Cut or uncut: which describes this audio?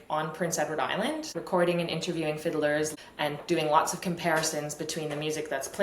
cut